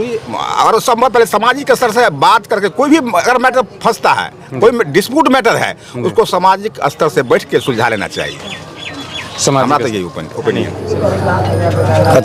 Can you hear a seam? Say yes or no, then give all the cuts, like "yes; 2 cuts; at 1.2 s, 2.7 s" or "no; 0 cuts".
yes; 1 cut; at 10.8 s